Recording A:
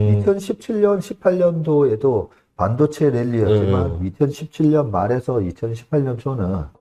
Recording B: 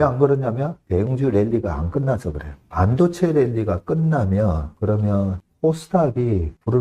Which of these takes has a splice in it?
B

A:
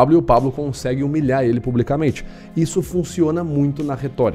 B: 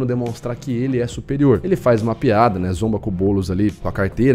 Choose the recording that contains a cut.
B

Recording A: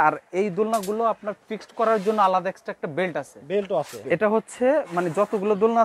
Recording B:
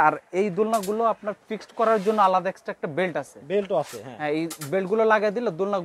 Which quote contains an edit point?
A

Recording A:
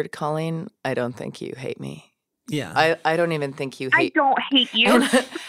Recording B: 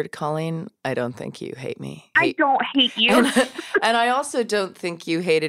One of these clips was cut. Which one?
B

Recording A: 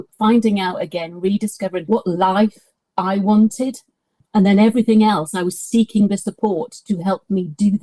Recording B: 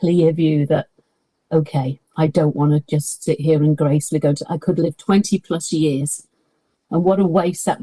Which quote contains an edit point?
A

